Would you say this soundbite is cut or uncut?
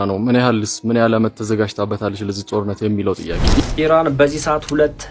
cut